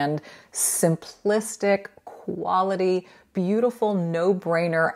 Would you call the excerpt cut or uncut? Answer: uncut